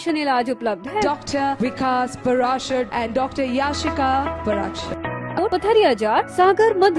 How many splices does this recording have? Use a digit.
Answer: 1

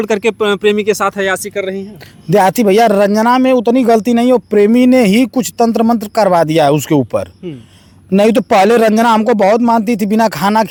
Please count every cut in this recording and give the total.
0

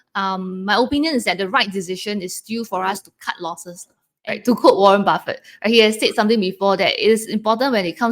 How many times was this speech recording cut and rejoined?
1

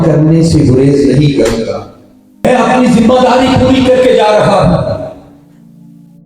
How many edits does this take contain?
1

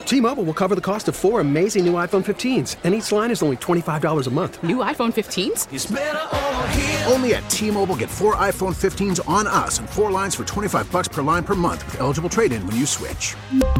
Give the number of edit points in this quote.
0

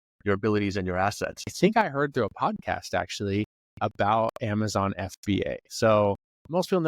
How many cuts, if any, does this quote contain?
1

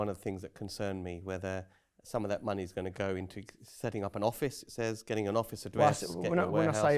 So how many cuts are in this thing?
0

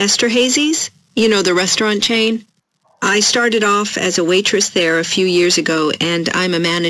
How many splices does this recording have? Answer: 2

